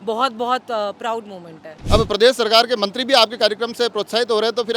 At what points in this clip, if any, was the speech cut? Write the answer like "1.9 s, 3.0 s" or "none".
1.8 s